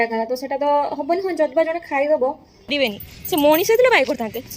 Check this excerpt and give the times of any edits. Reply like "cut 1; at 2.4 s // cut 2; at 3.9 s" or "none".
cut 1; at 2.7 s